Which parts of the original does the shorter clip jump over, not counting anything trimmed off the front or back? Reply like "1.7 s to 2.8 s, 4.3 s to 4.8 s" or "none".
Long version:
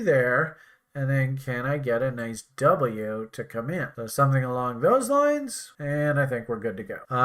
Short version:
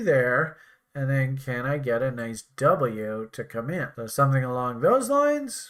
none